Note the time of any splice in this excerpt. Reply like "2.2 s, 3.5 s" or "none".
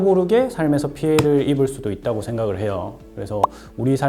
none